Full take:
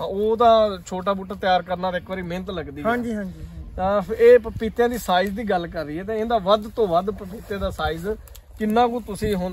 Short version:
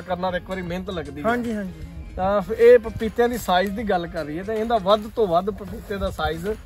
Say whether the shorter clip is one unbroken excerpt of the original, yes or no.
yes